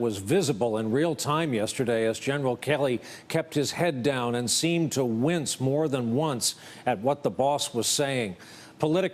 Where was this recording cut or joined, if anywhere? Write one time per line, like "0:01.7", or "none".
0:01.3